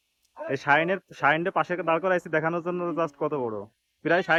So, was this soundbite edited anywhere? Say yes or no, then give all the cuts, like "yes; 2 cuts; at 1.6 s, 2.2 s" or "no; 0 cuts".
no; 0 cuts